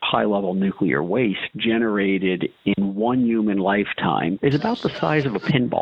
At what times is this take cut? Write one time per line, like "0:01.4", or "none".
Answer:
0:04.4